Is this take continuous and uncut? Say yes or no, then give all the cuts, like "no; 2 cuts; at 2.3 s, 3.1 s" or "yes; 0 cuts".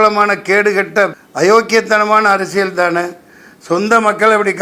no; 1 cut; at 1.2 s